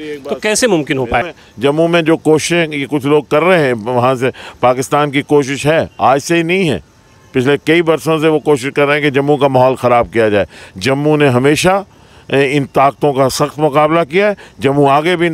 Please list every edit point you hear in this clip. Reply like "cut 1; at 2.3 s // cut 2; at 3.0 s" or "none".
cut 1; at 1.3 s